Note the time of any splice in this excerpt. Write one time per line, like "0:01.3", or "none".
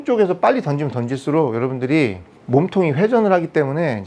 0:02.3